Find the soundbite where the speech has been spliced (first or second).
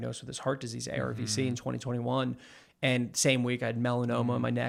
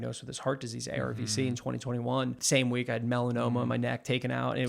second